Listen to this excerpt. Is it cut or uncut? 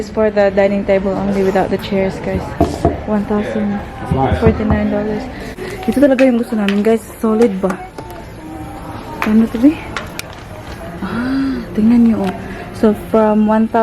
cut